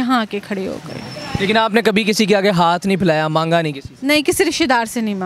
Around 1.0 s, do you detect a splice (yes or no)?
no